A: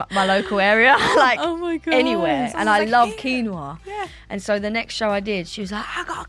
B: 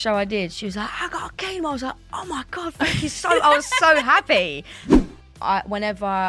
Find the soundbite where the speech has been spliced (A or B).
B